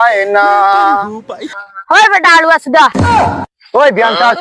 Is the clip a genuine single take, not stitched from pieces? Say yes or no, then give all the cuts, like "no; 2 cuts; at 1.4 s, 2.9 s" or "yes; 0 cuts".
no; 1 cut; at 1.6 s